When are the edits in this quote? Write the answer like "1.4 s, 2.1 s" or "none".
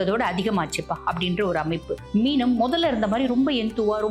2.0 s